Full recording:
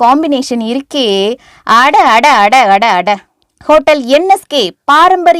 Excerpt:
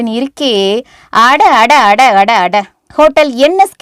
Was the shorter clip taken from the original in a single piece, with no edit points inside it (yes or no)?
no